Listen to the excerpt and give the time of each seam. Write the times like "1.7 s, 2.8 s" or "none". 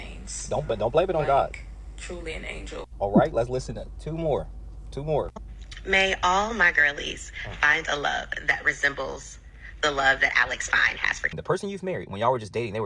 11.4 s